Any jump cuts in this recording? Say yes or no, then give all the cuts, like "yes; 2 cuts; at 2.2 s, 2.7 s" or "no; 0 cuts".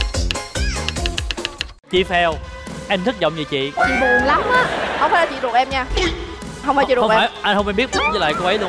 yes; 1 cut; at 1.6 s